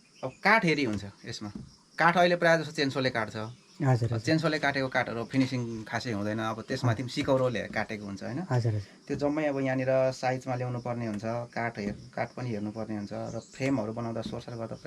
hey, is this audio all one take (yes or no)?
yes